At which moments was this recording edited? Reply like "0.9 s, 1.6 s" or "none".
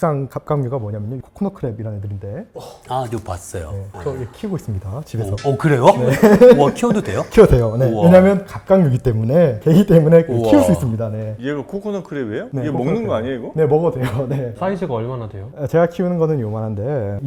none